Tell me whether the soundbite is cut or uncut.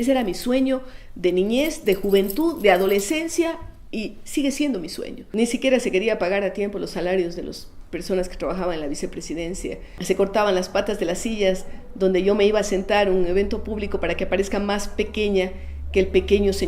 cut